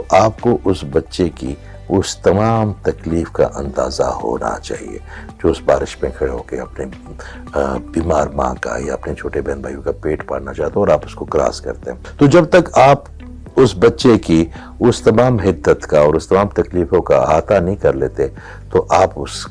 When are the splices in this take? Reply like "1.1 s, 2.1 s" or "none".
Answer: none